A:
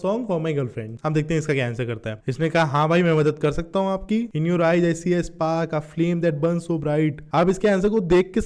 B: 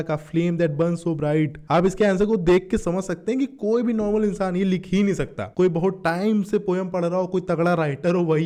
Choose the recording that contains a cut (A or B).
A